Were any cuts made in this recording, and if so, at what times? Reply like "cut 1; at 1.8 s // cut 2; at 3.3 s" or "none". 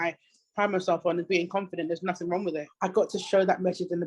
cut 1; at 2.7 s